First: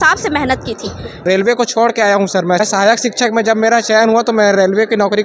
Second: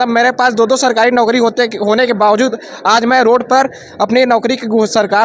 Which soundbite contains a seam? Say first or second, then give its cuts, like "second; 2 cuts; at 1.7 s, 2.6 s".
first; 2 cuts; at 1.2 s, 2.6 s